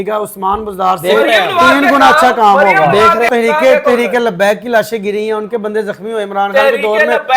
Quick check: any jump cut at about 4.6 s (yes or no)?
no